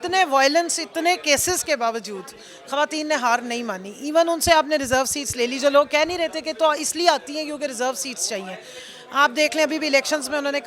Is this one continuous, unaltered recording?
yes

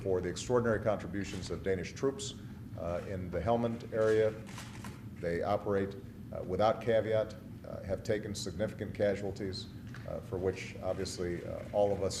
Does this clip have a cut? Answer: yes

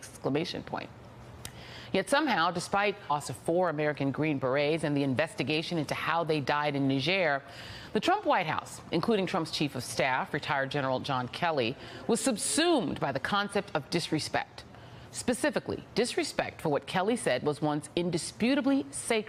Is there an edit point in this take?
no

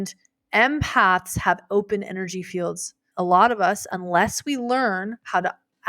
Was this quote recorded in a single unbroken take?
no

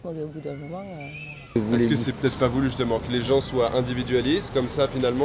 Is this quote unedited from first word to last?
no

